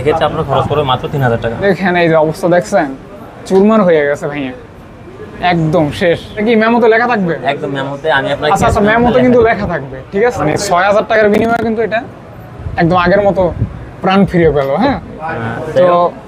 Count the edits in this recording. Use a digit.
4